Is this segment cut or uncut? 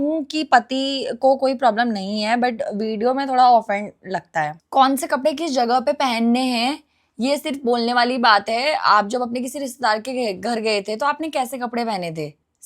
cut